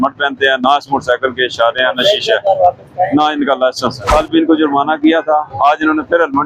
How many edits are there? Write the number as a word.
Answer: one